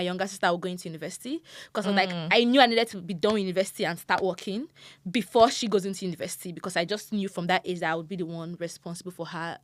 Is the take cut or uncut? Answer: uncut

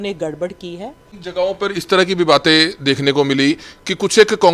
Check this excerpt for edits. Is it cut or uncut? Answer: cut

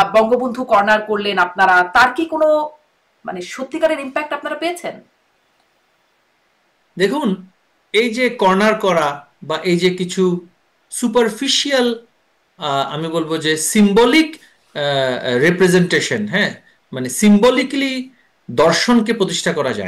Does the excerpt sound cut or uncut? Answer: uncut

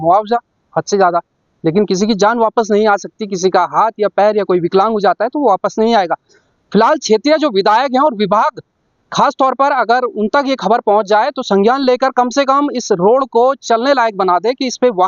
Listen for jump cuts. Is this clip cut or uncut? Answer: uncut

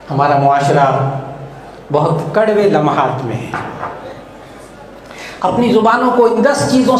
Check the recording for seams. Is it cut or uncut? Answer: uncut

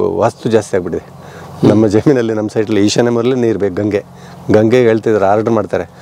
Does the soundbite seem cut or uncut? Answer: uncut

